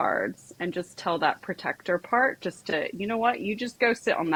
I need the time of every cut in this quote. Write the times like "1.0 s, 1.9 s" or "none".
none